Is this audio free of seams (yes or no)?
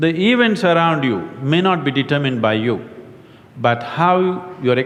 yes